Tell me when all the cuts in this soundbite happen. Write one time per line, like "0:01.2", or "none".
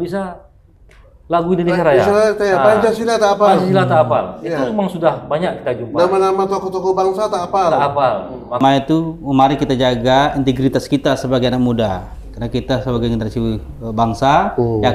0:08.6